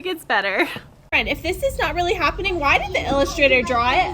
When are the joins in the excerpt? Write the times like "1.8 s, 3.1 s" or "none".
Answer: 1.1 s